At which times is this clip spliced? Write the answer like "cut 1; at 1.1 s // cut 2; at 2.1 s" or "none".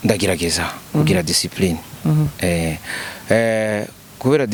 none